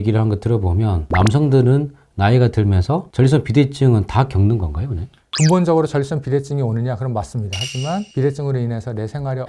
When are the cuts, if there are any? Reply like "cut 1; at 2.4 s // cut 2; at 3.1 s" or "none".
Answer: cut 1; at 1.0 s